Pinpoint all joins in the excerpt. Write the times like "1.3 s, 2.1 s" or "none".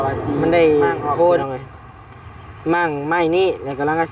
1.4 s